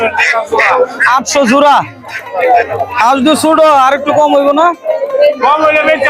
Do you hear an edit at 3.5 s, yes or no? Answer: no